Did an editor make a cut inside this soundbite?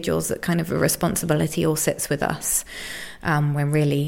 no; 0 cuts

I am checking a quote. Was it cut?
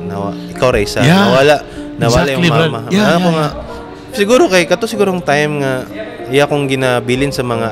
no; 0 cuts

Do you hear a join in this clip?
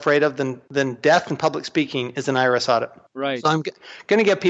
no; 0 cuts

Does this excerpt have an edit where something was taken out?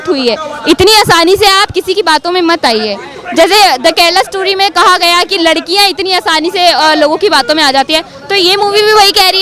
no; 0 cuts

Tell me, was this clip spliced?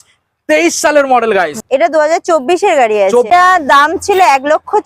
yes; 2 cuts; at 1.6 s, 3.3 s

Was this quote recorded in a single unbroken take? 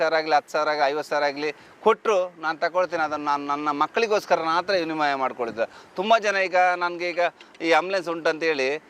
yes; 0 cuts

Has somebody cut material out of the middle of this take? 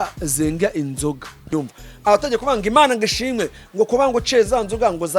yes; 1 cut; at 1.5 s

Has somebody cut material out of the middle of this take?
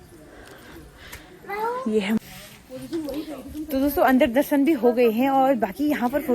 yes; 1 cut; at 2.2 s

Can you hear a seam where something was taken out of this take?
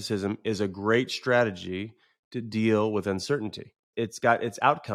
yes; 1 cut; at 3.8 s

